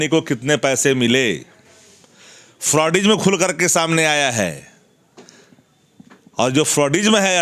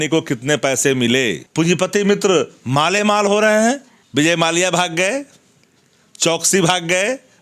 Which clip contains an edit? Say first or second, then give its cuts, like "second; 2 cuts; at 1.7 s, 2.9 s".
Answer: second; 2 cuts; at 1.4 s, 3.9 s